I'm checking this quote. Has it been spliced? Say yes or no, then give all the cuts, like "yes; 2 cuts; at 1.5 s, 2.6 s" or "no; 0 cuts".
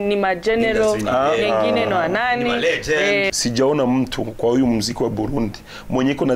yes; 1 cut; at 3.3 s